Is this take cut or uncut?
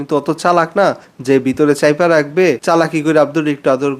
uncut